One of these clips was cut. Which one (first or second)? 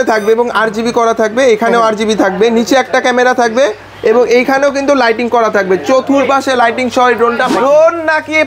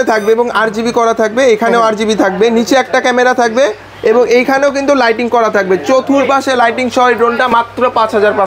first